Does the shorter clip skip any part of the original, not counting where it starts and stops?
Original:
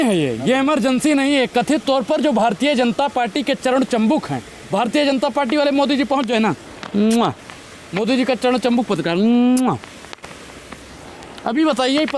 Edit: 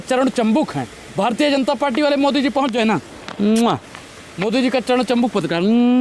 no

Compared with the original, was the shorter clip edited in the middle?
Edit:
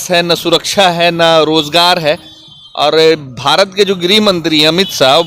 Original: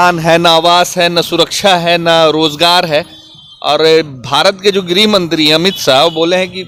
no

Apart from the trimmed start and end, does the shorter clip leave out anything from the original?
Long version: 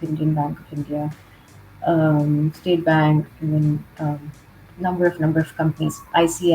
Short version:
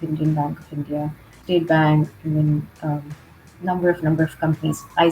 yes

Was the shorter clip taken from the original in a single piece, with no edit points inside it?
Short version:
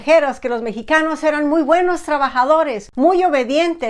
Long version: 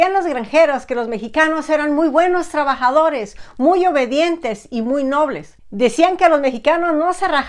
no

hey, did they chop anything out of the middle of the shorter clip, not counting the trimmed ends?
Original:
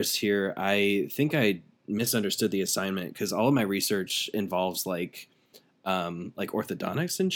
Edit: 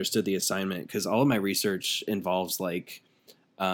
no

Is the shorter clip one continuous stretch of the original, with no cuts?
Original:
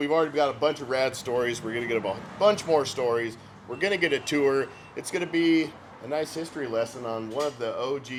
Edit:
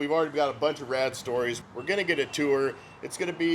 no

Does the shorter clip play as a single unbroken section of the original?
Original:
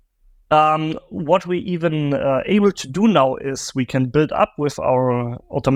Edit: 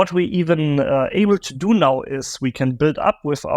yes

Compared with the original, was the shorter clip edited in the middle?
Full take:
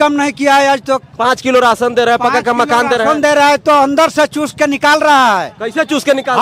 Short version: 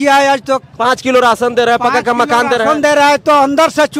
no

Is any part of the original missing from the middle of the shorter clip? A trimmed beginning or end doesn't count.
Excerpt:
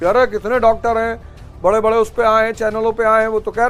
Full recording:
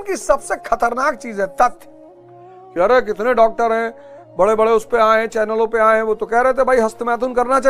no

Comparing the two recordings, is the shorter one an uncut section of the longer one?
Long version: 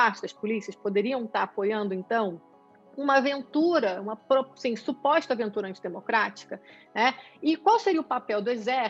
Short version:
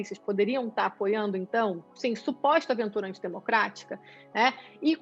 no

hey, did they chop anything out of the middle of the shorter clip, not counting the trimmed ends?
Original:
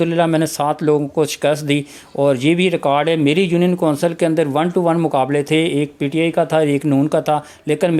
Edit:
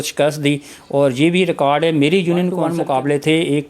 yes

